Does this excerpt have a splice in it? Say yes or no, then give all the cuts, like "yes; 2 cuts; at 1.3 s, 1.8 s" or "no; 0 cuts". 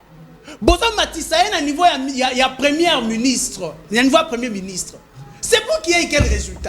no; 0 cuts